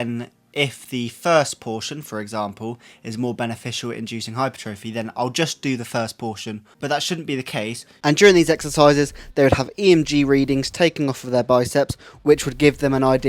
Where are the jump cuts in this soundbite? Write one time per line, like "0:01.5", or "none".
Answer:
0:06.7
0:07.8